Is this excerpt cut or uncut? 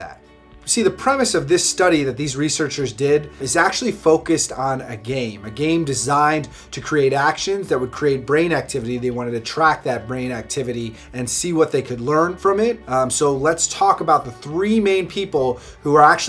cut